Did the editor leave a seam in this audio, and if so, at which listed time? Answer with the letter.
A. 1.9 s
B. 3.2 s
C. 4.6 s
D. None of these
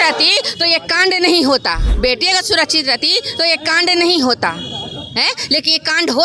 A